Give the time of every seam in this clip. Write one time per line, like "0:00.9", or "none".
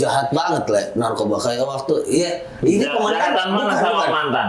none